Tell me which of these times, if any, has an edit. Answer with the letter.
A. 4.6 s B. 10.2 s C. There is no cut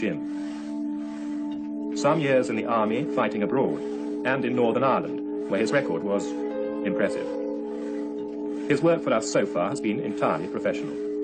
C